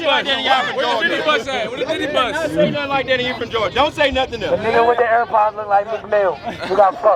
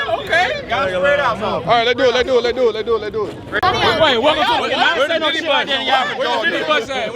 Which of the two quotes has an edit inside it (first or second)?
second